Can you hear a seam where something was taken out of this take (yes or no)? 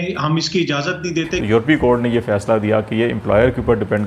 yes